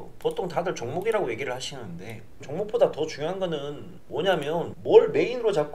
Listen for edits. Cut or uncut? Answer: cut